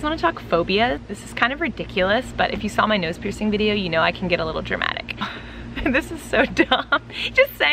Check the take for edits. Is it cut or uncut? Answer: cut